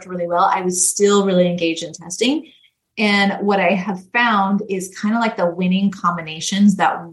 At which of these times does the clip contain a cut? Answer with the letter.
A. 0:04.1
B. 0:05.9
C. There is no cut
C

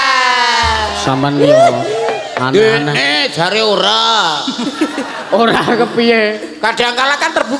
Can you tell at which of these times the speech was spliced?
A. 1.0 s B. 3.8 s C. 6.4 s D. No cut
D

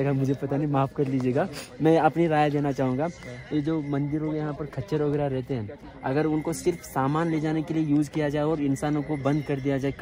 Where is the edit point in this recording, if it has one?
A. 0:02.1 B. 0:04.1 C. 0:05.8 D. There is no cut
D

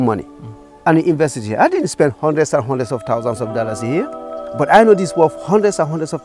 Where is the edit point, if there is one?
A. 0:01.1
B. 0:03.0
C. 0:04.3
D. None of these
D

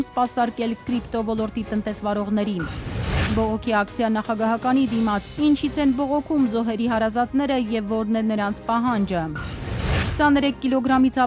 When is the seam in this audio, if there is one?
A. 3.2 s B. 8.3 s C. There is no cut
A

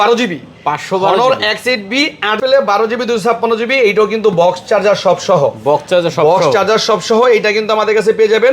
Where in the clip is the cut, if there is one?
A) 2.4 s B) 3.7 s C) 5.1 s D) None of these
A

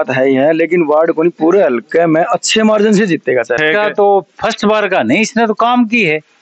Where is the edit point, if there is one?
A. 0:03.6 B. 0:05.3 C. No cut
A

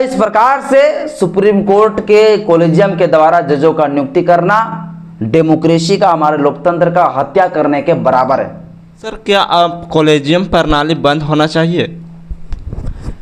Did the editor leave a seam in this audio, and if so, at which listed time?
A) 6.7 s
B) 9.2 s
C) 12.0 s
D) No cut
B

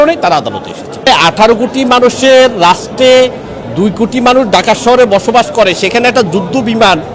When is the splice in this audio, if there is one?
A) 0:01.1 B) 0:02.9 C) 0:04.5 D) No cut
A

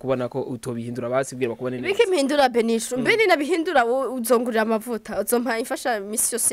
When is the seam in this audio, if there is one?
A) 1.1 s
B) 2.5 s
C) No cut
C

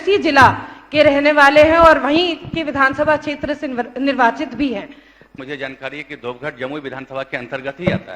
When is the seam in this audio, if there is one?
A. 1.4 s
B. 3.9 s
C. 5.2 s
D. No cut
C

